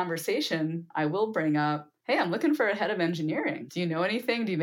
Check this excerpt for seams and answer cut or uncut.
cut